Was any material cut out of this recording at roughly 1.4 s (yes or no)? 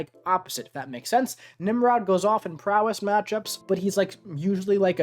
no